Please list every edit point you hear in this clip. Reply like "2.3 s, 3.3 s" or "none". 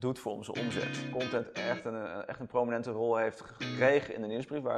1.1 s